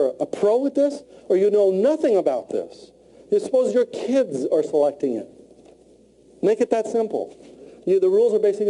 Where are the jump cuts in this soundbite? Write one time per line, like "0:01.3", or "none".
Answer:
0:04.3